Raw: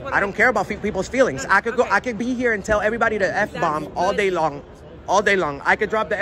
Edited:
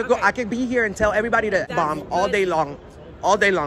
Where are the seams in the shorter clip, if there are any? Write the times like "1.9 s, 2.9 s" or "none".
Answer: 1.7 s